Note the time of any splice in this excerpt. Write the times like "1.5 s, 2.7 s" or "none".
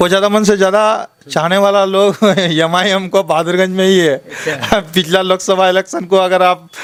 none